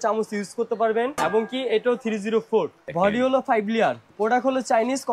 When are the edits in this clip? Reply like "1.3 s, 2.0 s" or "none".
1.1 s, 2.8 s, 4.1 s